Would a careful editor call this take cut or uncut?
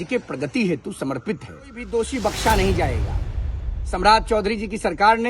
cut